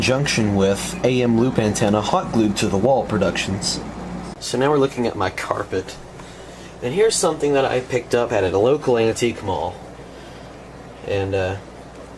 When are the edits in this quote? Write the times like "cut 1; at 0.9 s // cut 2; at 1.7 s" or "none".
cut 1; at 7.0 s